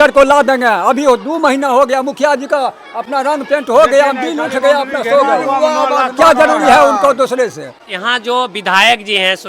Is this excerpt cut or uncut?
uncut